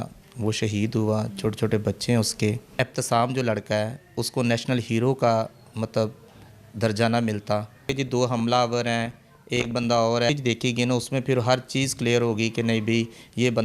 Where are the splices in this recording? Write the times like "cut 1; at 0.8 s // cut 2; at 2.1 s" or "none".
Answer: cut 1; at 2.7 s // cut 2; at 7.9 s // cut 3; at 10.3 s